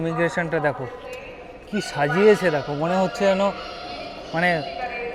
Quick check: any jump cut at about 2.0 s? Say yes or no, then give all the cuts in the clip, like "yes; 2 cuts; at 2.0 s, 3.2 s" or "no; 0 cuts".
no; 0 cuts